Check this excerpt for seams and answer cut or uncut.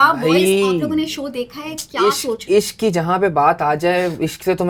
uncut